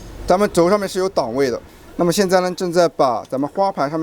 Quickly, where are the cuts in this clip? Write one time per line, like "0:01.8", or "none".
0:01.7